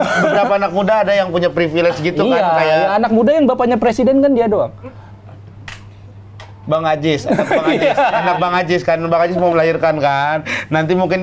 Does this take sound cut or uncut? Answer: uncut